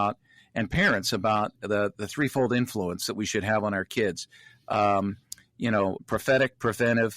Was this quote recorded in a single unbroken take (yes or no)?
no